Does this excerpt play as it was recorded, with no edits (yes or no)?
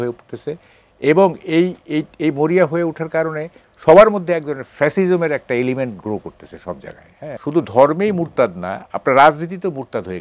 no